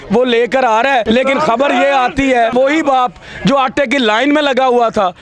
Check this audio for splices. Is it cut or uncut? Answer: cut